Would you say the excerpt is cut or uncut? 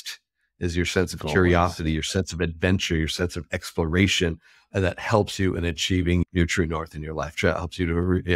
uncut